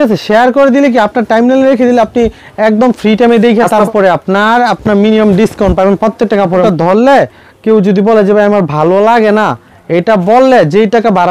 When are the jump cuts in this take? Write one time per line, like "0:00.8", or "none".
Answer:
0:03.9
0:06.6

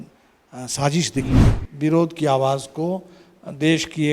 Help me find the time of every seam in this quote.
0:01.4

